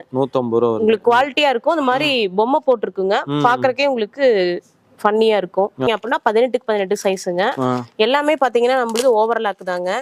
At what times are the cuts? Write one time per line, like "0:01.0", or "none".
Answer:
0:05.9

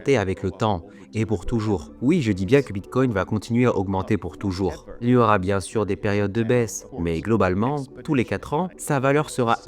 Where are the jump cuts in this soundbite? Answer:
0:06.8
0:08.8

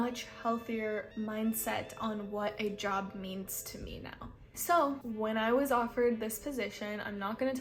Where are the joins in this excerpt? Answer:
none

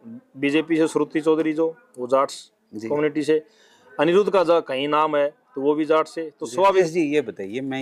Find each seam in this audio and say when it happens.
0:06.7

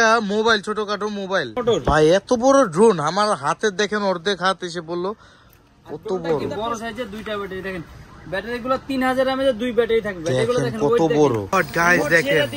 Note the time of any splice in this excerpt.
0:01.6
0:06.5
0:11.5

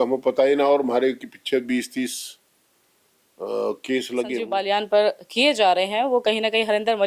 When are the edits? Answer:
0:04.5

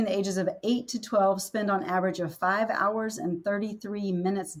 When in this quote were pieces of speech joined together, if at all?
none

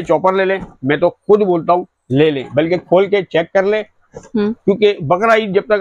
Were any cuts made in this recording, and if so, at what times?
none

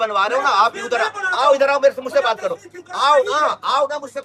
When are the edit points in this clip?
none

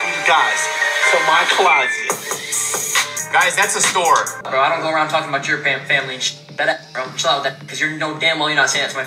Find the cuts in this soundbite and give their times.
0:03.2
0:04.4

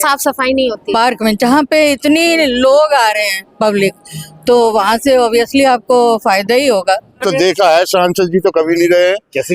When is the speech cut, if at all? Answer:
0:07.2

